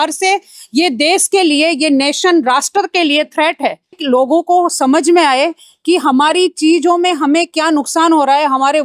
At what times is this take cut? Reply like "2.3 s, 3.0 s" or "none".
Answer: 4.0 s